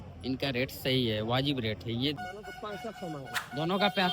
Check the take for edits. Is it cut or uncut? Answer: cut